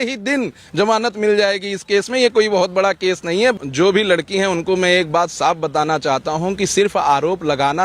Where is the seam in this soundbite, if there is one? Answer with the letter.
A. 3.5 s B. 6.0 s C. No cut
A